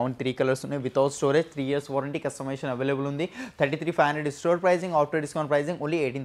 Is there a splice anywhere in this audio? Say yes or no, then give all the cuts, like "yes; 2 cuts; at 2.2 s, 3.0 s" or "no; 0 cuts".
no; 0 cuts